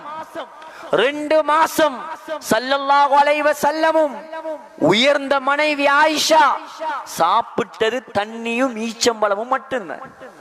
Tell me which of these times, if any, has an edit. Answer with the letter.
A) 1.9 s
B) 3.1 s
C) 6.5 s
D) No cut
D